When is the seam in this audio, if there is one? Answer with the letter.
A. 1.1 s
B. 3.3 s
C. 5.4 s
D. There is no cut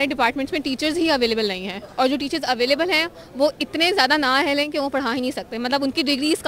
D